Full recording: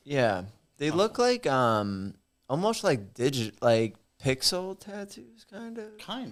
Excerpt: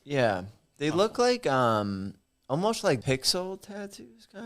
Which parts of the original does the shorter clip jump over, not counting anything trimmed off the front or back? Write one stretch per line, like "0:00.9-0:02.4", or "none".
0:03.0-0:04.2